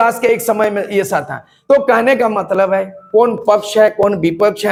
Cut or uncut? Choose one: uncut